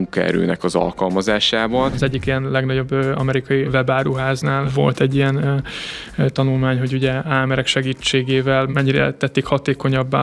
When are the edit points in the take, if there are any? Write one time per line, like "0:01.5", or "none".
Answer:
0:02.0
0:03.7
0:04.7
0:07.3
0:08.7